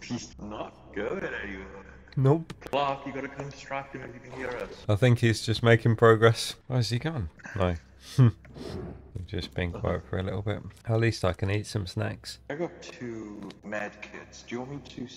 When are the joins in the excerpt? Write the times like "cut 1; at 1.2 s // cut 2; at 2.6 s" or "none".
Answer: none